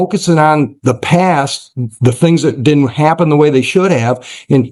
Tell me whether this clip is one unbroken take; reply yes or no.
yes